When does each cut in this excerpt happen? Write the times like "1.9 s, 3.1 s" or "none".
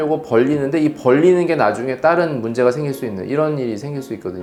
none